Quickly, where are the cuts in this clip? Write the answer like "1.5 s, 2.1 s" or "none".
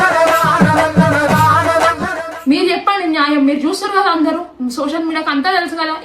2.3 s